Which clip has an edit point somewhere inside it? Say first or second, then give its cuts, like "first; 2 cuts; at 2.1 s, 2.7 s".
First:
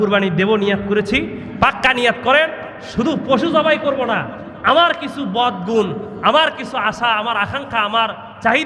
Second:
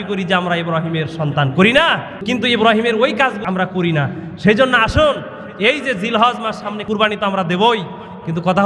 second; 3 cuts; at 2.2 s, 3.4 s, 6.8 s